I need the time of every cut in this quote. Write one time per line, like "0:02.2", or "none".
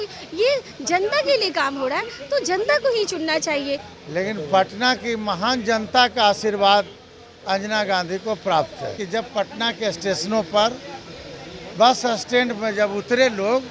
0:03.9
0:09.0

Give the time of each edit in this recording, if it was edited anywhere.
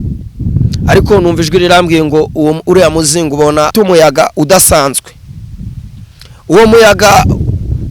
0:03.7

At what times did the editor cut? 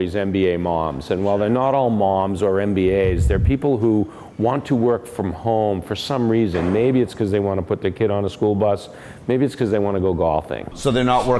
none

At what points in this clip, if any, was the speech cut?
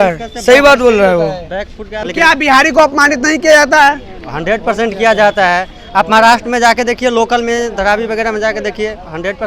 0:02.0

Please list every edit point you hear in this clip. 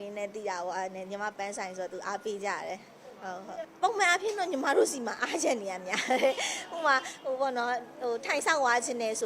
0:03.7

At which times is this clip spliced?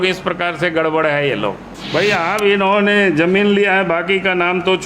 0:01.7

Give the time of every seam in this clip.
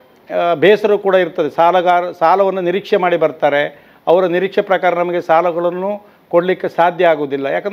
none

